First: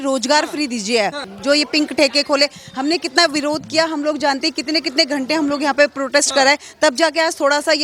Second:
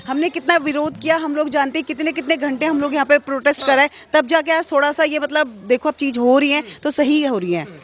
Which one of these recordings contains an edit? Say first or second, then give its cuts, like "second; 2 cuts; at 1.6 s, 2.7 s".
first; 1 cut; at 1.3 s